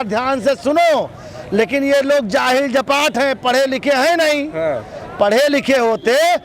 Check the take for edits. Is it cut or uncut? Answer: uncut